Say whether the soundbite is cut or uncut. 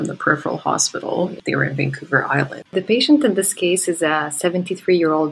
cut